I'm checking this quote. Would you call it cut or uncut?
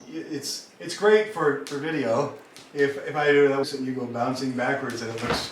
cut